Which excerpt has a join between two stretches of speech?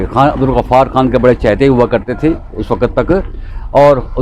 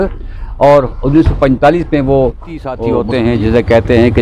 second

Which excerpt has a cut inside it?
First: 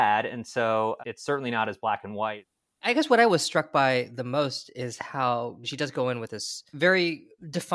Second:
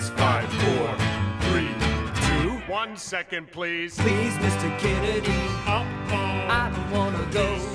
first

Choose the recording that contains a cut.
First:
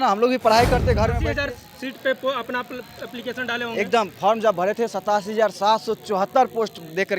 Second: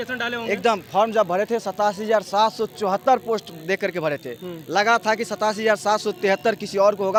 first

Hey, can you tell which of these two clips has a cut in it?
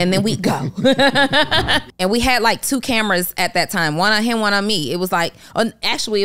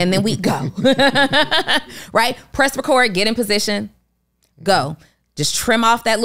first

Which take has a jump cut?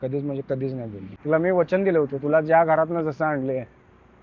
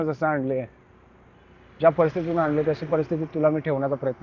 first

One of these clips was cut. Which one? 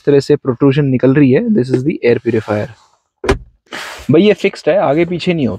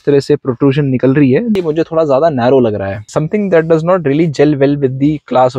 second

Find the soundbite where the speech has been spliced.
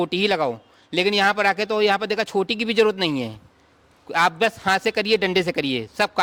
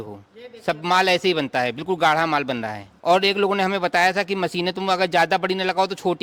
second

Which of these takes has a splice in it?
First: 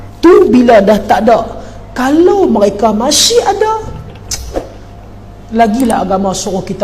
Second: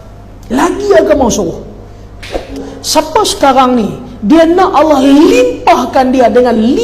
second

